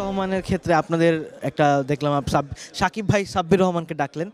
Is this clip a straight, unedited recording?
yes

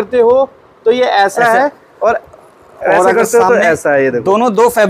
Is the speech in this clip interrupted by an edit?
no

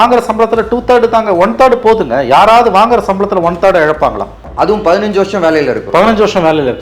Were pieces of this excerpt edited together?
yes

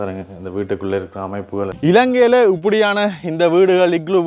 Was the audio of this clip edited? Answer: yes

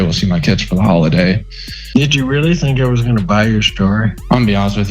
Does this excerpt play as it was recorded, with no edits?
no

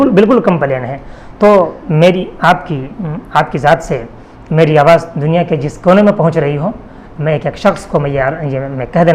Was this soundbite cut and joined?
no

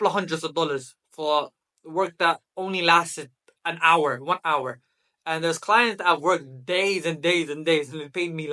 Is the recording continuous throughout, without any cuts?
yes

